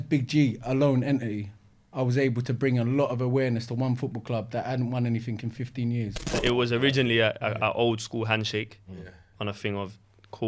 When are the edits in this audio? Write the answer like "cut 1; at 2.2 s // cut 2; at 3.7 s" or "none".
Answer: cut 1; at 6.3 s